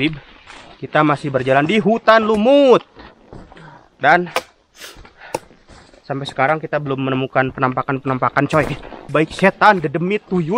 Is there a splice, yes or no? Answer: yes